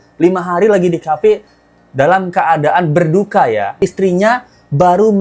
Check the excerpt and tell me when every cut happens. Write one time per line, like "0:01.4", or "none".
0:03.8